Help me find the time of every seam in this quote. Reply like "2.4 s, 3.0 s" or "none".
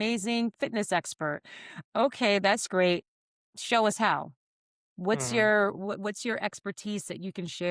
none